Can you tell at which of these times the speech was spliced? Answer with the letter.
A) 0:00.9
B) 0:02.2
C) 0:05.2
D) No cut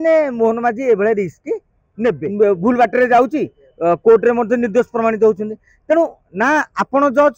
B